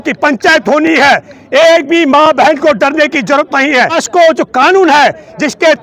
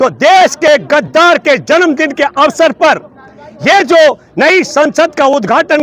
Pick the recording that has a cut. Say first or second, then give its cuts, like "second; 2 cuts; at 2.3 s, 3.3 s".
first; 1 cut; at 4.0 s